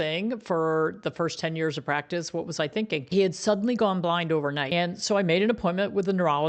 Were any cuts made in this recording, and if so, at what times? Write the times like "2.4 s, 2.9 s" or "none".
3.1 s, 4.7 s